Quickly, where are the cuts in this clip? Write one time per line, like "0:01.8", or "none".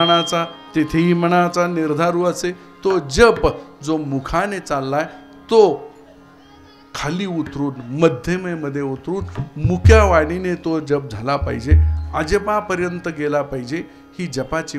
none